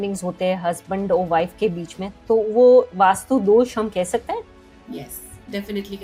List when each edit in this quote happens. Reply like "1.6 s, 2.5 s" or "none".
none